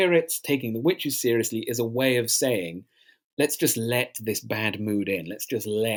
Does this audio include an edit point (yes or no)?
no